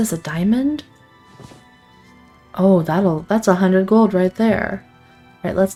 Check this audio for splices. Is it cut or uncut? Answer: uncut